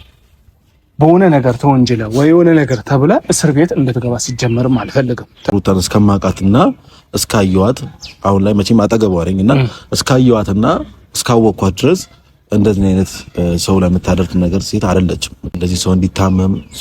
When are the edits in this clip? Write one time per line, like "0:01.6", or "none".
0:05.5
0:15.6